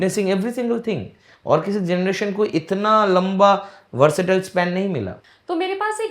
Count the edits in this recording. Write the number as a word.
one